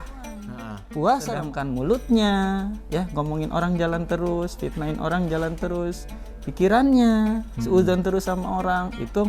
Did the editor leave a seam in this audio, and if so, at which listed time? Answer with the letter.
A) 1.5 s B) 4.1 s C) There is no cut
A